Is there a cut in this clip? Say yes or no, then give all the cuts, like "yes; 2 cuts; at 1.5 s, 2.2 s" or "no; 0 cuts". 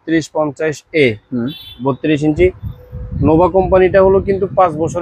no; 0 cuts